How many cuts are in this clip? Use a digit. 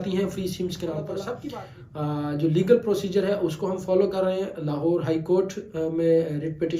1